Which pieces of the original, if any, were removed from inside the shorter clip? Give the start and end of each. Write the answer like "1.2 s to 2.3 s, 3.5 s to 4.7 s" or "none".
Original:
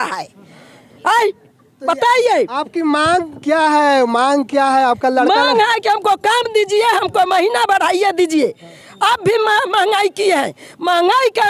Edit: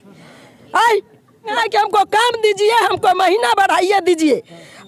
1.9 s to 5.7 s